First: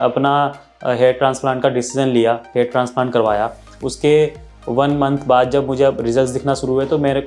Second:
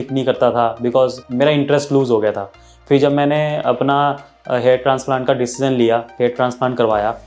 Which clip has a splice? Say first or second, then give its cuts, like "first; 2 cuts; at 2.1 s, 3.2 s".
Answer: second; 1 cut; at 1.2 s